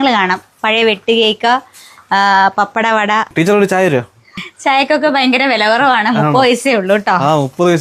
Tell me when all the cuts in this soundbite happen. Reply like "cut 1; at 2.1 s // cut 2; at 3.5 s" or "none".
cut 1; at 3.3 s // cut 2; at 4.4 s